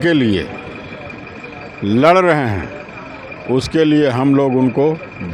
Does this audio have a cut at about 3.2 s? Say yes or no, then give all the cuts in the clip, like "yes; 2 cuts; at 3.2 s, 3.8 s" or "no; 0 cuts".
no; 0 cuts